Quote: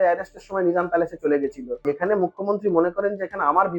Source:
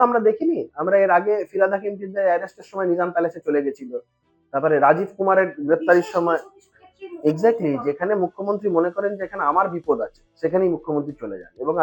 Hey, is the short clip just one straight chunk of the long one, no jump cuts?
no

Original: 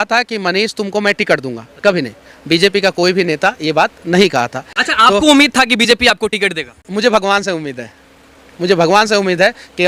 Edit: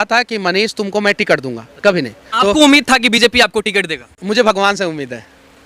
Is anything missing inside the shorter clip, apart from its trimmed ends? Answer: yes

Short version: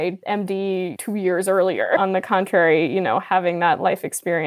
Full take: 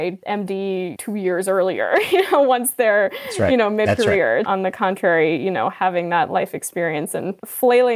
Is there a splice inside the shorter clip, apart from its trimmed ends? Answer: yes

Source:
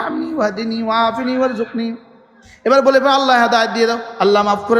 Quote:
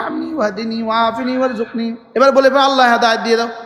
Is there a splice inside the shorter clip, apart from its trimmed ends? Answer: yes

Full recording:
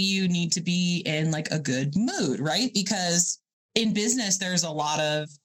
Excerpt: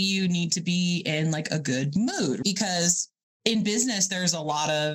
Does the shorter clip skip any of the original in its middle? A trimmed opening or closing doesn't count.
yes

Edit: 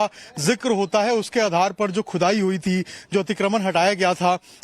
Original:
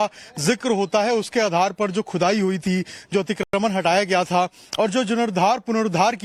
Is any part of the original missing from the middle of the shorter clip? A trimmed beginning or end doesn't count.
yes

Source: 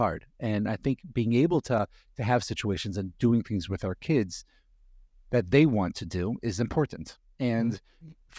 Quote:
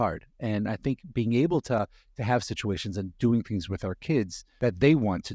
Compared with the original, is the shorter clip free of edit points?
no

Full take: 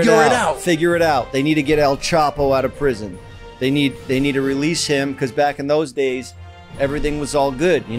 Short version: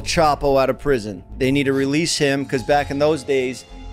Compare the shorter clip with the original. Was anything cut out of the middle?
yes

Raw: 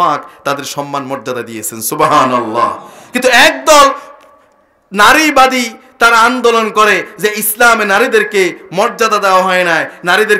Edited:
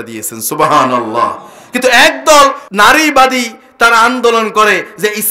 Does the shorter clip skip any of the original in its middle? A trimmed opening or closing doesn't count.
yes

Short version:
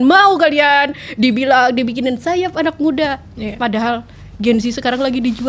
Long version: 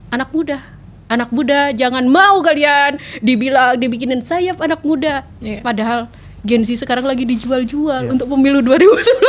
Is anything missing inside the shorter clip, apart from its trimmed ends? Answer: no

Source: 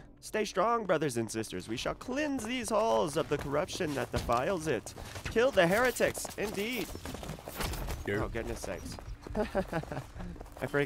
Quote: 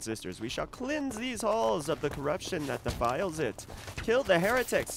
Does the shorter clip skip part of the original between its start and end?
no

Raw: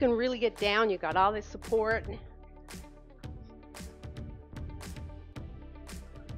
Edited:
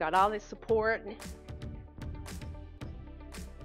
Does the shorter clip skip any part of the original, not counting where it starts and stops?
yes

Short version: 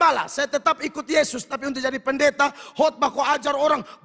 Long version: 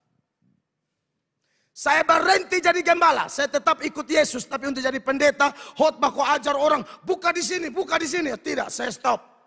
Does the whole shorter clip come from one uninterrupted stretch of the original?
yes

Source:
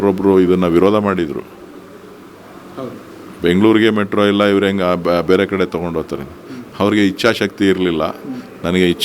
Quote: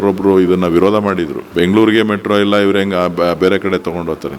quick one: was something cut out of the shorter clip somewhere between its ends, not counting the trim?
yes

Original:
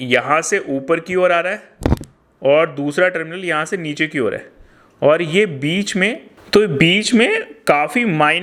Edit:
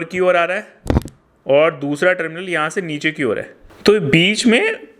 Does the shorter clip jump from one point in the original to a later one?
yes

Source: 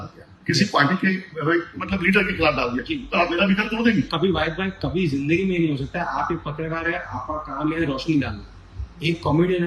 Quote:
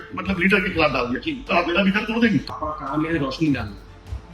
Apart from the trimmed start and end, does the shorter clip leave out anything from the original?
yes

